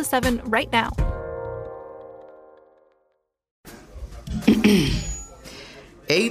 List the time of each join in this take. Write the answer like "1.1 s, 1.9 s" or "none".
3.5 s